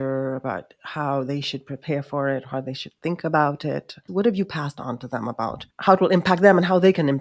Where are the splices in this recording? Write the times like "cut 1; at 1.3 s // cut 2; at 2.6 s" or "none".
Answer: cut 1; at 4.0 s // cut 2; at 5.6 s